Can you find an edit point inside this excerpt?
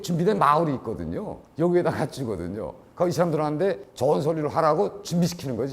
yes; 1 cut; at 2.7 s

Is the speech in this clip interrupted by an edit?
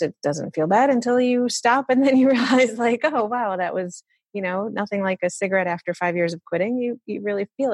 no; 0 cuts

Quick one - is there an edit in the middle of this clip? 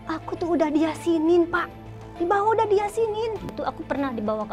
yes; 1 cut; at 3.5 s

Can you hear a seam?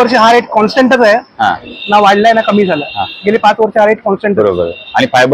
no; 0 cuts

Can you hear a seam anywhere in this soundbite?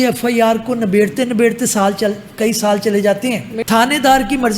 yes; 1 cut; at 3.5 s

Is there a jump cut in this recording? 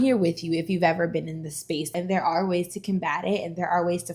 yes; 1 cut; at 1.9 s

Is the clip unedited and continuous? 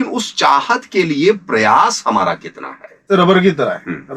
no; 1 cut; at 3.1 s

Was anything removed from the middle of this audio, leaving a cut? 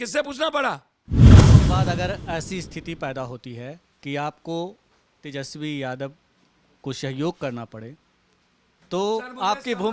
yes; 2 cuts; at 0.9 s, 1.8 s

